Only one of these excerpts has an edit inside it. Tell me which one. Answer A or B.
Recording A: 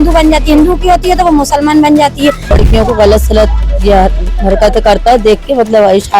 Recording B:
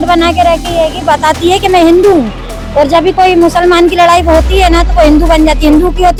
A